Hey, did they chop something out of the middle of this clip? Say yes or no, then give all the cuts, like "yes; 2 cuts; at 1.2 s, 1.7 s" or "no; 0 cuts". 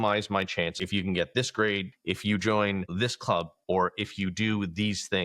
yes; 2 cuts; at 0.8 s, 1.9 s